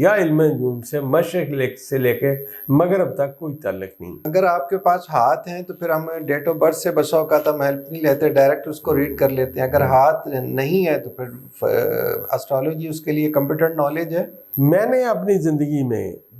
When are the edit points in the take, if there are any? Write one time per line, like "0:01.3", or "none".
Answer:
0:04.2
0:14.4